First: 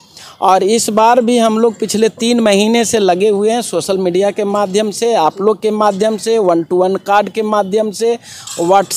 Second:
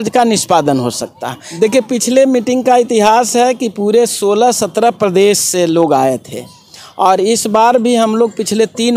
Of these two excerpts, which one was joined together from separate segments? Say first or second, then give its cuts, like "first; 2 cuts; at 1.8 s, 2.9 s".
second; 1 cut; at 1.4 s